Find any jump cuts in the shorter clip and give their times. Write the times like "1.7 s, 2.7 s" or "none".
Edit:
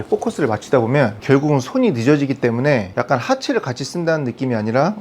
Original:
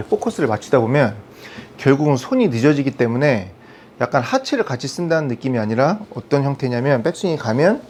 1.2 s, 2.9 s